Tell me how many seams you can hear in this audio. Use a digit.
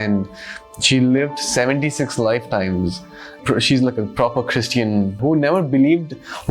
2